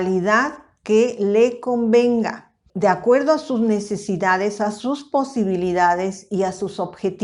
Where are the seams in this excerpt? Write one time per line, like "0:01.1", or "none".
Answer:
0:02.6